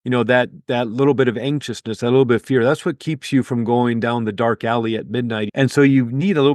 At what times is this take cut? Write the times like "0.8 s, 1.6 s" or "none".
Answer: 5.5 s